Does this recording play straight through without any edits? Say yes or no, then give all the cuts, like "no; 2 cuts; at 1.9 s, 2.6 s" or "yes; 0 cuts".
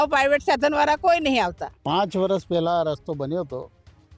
no; 1 cut; at 1.7 s